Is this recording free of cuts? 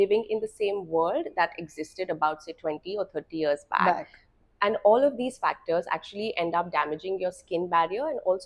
yes; 0 cuts

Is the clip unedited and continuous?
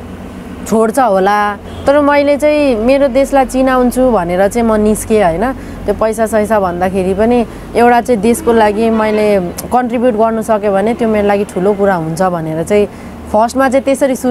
yes; 0 cuts

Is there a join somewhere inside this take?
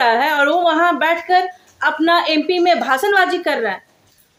no; 0 cuts

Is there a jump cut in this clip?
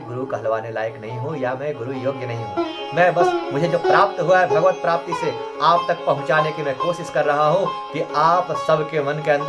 no; 0 cuts

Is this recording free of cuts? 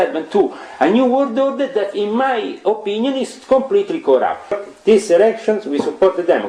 no; 1 cut; at 4.6 s

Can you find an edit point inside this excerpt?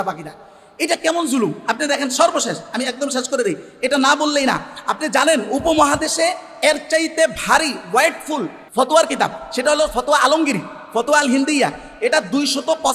yes; 1 cut; at 8.7 s

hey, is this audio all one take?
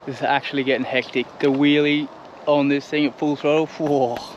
yes; 0 cuts

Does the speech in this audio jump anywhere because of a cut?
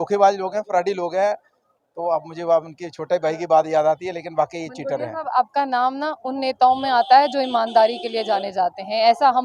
no; 0 cuts

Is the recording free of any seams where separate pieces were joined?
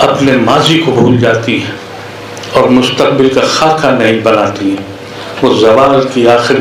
yes; 0 cuts

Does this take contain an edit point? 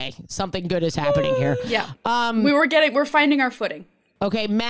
no; 0 cuts

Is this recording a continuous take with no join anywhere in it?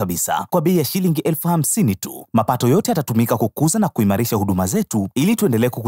yes; 0 cuts

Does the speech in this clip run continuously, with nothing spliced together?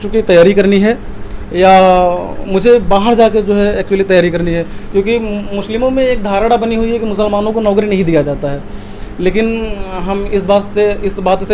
yes; 0 cuts

